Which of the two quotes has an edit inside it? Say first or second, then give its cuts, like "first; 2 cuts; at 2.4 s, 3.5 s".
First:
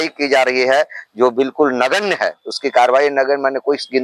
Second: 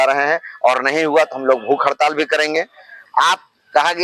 second; 1 cut; at 3.0 s